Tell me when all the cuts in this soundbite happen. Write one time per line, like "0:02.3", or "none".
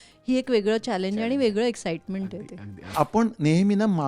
0:02.9